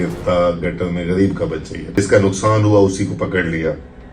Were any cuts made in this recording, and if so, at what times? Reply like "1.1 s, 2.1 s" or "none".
1.9 s